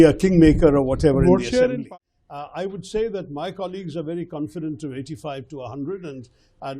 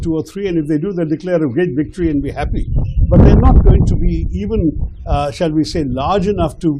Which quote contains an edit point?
first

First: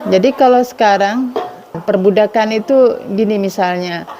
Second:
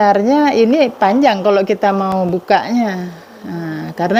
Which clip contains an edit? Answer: first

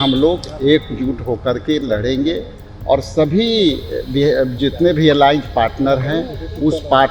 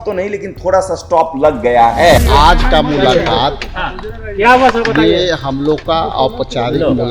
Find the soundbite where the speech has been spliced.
second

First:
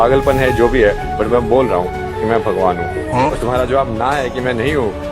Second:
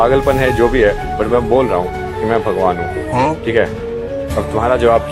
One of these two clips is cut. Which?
first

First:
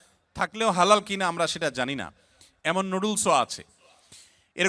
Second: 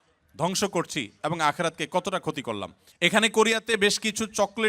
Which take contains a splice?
second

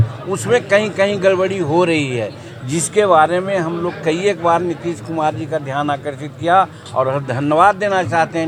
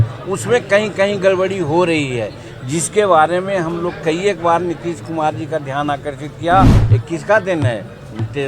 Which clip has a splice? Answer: second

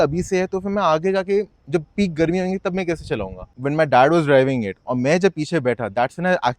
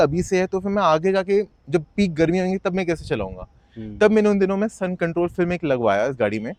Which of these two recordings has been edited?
first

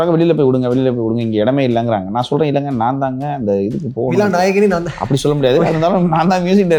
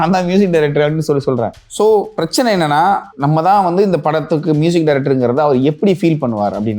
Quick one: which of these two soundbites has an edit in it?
second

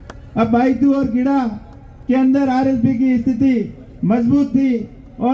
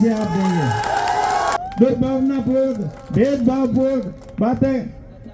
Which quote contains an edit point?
second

